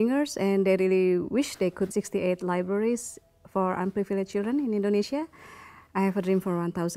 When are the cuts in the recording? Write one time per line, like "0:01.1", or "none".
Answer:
none